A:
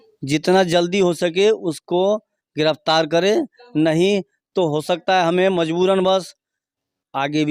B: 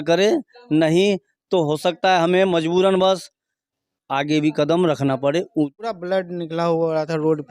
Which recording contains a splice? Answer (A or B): B